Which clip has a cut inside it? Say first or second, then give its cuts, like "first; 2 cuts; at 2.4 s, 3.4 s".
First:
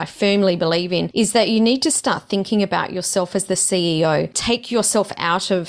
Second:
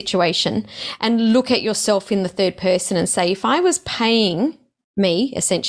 first; 2 cuts; at 1.1 s, 4.4 s